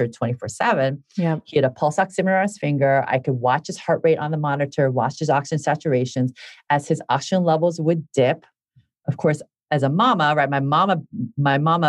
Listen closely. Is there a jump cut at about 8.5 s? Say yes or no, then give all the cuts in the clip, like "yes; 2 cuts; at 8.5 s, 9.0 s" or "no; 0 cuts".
no; 0 cuts